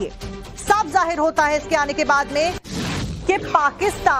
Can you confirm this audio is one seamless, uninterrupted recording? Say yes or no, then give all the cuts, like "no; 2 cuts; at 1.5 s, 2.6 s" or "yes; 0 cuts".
no; 1 cut; at 1.3 s